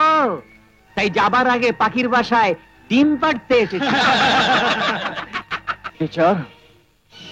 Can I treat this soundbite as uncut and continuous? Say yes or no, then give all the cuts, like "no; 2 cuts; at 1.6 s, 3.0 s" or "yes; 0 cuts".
no; 1 cut; at 5.8 s